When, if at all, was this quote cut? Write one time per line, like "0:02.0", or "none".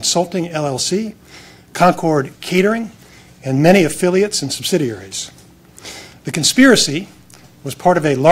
none